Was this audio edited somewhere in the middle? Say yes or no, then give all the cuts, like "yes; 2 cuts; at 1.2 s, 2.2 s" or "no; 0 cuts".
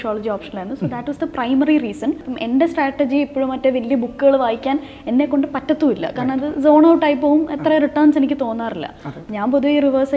yes; 1 cut; at 2.3 s